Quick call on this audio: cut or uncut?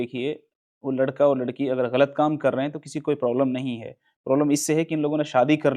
uncut